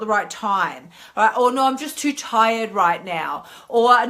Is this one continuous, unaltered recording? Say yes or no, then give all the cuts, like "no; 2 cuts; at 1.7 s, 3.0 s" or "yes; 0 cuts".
yes; 0 cuts